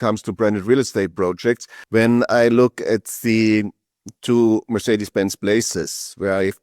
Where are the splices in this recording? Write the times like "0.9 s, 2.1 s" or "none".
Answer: 1.7 s